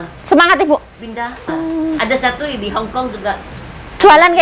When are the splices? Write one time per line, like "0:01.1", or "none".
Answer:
0:01.5